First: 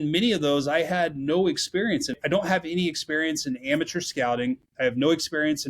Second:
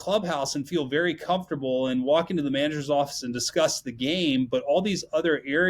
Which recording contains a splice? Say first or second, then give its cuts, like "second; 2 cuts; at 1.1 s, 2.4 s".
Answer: first; 1 cut; at 2.2 s